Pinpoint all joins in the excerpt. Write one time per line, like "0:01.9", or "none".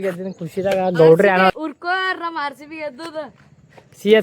0:01.5